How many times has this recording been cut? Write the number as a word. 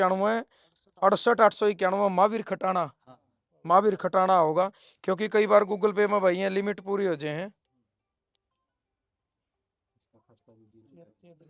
zero